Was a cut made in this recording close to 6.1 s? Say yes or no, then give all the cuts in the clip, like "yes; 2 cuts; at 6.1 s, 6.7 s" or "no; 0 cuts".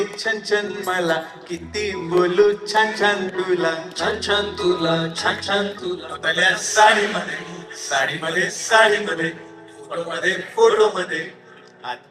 yes; 1 cut; at 6.1 s